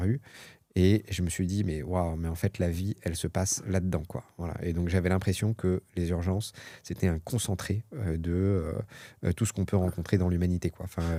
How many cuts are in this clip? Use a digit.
0